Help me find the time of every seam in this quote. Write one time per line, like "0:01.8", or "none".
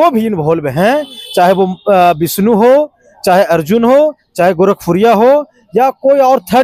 none

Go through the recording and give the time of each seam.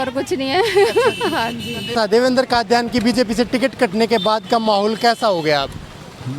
0:01.9

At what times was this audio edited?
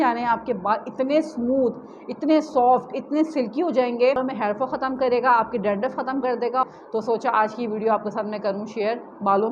0:04.2
0:06.6

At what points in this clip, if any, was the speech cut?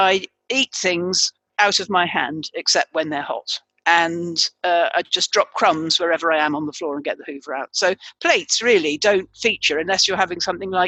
none

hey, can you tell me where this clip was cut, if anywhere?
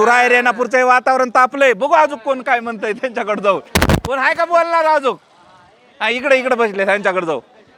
none

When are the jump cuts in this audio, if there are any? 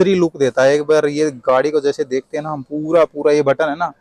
none

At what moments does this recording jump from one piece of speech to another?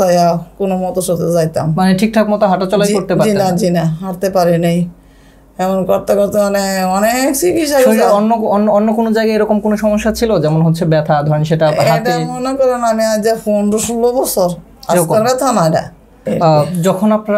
0:16.2

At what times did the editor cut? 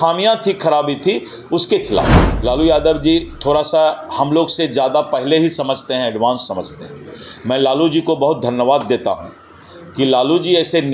0:02.2

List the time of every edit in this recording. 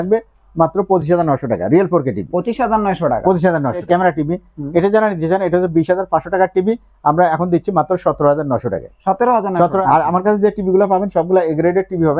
0:03.8
0:09.8

